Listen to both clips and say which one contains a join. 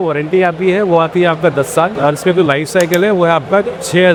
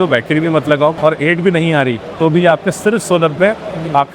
second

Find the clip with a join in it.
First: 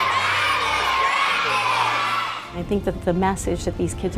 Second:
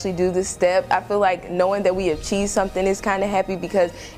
first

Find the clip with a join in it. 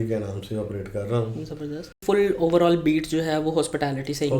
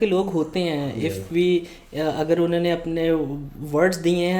first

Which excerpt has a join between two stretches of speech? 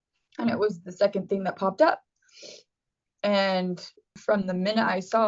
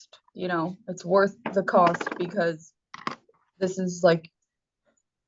first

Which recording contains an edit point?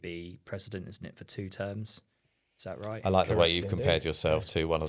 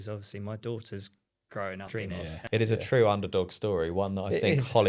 second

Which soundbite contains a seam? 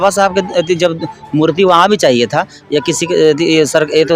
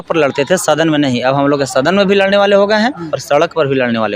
second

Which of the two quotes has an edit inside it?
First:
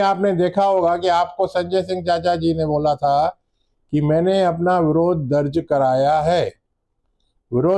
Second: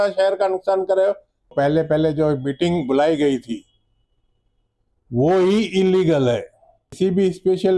second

